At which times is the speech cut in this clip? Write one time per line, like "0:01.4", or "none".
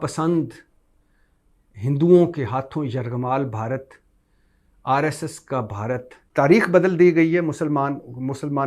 0:06.2